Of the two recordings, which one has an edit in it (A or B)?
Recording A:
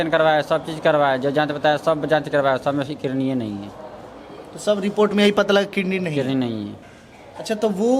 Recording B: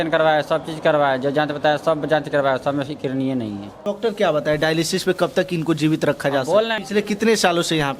B